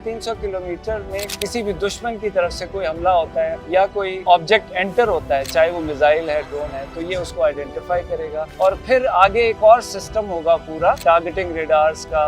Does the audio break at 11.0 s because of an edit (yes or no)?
yes